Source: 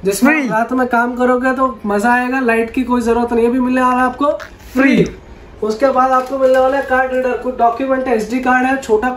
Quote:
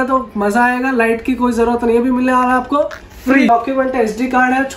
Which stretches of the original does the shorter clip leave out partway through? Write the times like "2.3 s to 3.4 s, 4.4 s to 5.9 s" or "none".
5.0 s to 7.6 s